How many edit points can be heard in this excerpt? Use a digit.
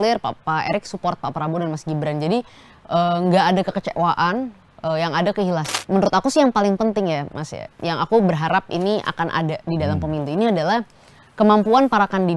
1